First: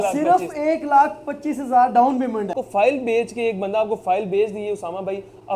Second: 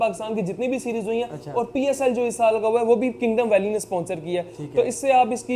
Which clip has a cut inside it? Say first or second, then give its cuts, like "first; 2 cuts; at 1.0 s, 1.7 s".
first; 1 cut; at 2.6 s